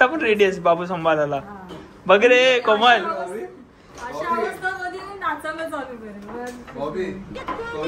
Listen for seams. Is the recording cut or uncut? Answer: uncut